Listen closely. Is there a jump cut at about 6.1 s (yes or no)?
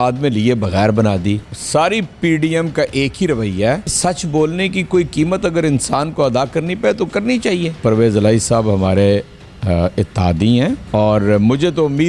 no